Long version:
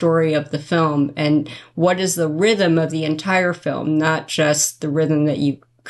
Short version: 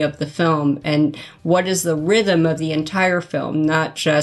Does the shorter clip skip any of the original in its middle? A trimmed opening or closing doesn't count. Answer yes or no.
no